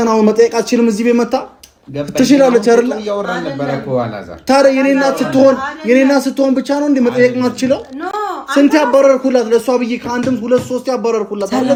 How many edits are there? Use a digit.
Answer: 0